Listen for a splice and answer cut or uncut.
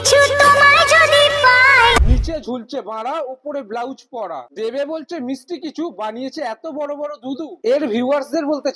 cut